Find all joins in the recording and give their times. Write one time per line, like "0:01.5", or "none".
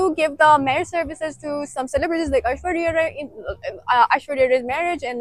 none